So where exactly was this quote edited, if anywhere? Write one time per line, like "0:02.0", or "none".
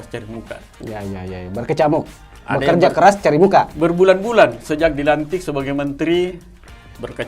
0:03.7